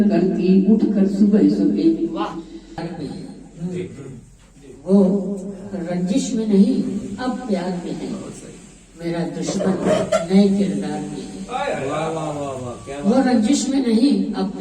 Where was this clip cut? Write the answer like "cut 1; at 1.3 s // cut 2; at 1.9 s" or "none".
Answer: cut 1; at 3.0 s